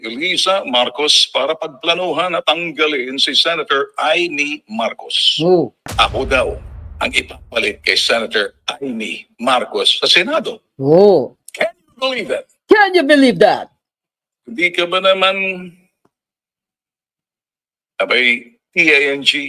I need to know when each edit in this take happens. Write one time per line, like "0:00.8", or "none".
0:05.8